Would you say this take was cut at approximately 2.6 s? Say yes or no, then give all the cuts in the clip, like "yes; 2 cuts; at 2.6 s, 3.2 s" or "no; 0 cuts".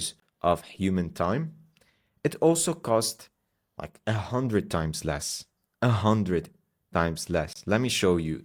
no; 0 cuts